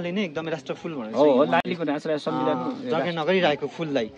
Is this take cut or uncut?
uncut